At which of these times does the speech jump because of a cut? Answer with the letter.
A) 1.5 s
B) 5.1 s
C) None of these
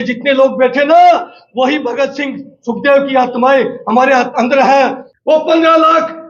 B